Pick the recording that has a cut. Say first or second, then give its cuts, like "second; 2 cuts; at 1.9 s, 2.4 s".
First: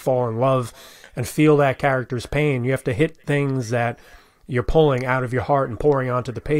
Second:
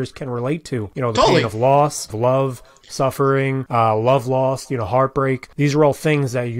second; 4 cuts; at 0.9 s, 2.1 s, 3.6 s, 5.5 s